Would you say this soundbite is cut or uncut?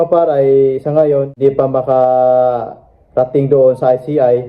cut